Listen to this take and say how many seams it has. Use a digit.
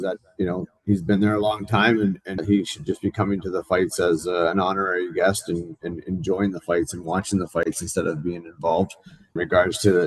2